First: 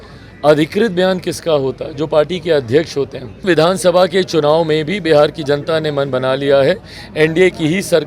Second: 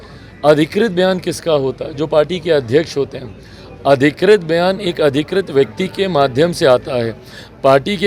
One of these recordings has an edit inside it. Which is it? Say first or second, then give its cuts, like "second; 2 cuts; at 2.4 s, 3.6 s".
first; 1 cut; at 3.4 s